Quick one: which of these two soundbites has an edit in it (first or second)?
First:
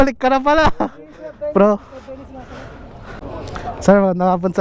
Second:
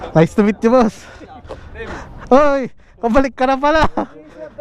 first